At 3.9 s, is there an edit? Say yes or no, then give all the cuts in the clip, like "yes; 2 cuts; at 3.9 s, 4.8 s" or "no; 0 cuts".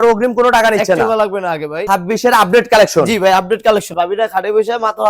yes; 2 cuts; at 1.8 s, 3.9 s